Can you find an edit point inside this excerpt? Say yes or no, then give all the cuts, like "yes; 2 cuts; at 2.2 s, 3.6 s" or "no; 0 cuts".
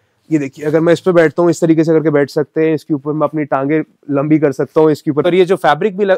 yes; 1 cut; at 5.3 s